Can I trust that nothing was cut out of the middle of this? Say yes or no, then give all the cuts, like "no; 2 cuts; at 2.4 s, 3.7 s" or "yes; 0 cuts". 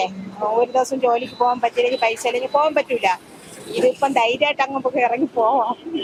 yes; 0 cuts